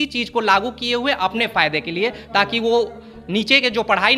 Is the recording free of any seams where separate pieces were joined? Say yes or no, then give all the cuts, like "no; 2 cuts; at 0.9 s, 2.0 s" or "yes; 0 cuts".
yes; 0 cuts